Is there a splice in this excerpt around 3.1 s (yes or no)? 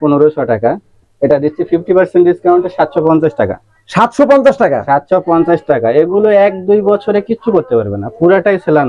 no